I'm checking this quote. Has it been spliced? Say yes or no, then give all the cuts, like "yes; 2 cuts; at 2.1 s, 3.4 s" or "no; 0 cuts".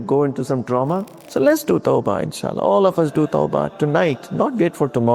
yes; 1 cut; at 1.1 s